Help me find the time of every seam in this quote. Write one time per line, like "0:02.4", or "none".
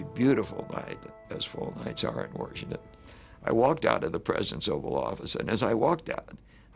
0:01.1